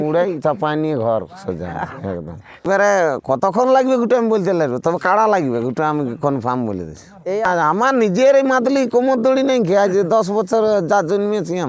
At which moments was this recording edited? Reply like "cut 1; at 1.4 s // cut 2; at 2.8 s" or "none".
cut 1; at 2.7 s // cut 2; at 7.5 s